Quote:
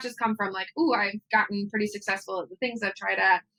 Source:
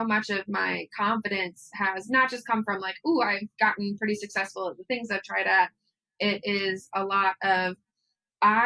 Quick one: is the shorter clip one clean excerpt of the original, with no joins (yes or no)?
yes